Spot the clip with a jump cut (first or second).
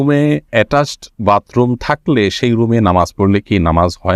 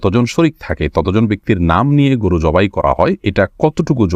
second